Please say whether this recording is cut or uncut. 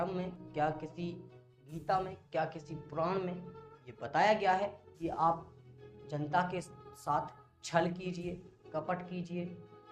uncut